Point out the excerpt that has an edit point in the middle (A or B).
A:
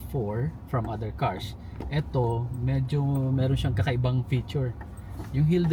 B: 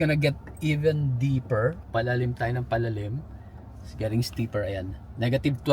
B